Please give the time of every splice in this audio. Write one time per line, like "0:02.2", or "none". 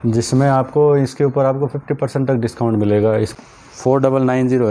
0:03.3

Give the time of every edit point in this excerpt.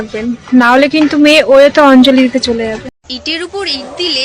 0:03.0

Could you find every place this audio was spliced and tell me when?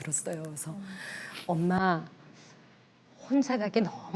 none

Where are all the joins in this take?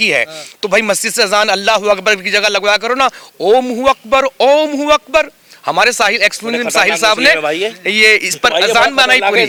none

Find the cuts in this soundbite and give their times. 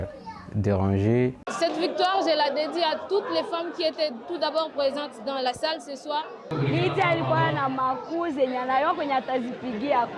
0:01.5
0:06.5

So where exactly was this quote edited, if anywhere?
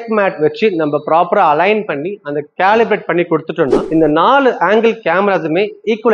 none

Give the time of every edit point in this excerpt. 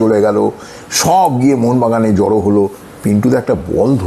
0:02.8

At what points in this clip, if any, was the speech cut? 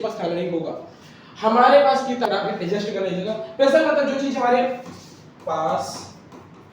0:02.3

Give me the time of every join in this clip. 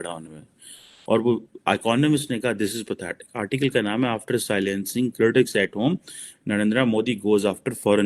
none

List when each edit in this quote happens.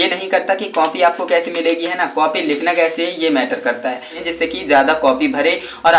0:04.2

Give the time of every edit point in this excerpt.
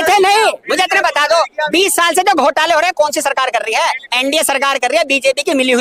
none

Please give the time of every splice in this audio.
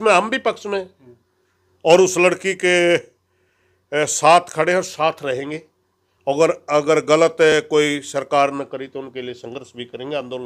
none

